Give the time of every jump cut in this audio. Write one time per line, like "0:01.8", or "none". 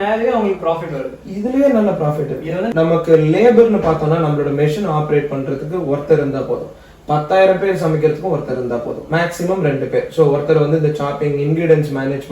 0:02.7